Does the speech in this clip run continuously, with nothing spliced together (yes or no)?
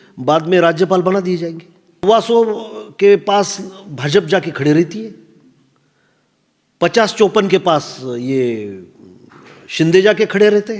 no